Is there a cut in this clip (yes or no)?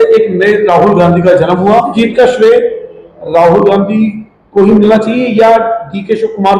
yes